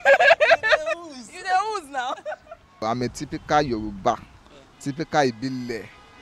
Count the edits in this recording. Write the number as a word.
one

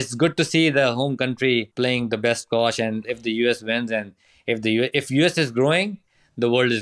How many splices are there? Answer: two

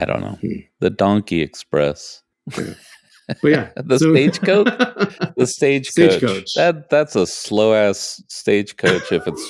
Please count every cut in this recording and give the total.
zero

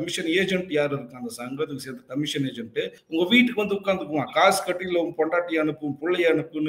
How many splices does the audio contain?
one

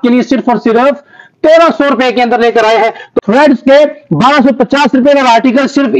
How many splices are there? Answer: one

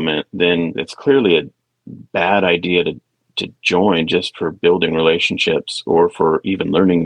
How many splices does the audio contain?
zero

